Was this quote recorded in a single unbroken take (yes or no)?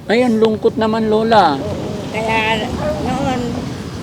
yes